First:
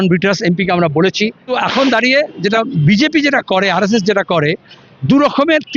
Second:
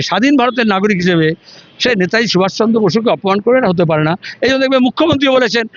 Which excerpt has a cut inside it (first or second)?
first